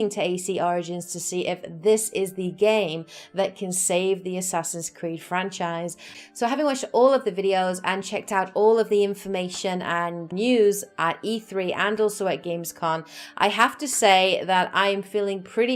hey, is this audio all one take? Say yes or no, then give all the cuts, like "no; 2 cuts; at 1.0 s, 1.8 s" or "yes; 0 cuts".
yes; 0 cuts